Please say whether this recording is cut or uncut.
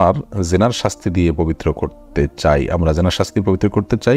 uncut